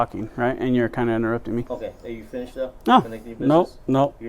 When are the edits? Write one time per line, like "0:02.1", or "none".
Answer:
0:01.7